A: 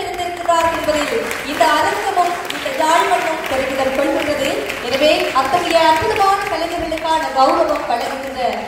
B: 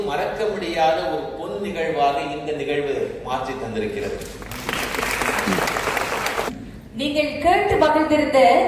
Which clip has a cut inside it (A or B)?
B